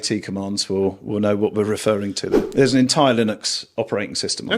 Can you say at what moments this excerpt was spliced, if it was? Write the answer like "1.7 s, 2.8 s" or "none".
2.3 s